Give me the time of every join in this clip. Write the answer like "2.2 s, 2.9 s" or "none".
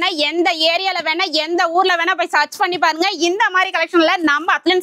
none